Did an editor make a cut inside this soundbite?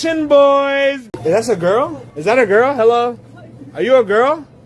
yes; 2 cuts; at 1.1 s, 2.0 s

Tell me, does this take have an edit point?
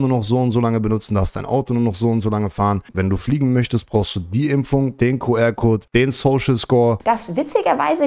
yes; 3 cuts; at 2.9 s, 5.8 s, 7.0 s

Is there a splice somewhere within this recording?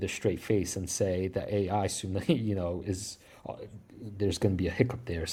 no; 0 cuts

